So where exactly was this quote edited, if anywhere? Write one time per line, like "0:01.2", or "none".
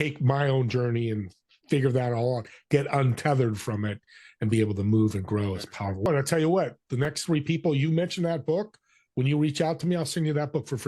0:06.1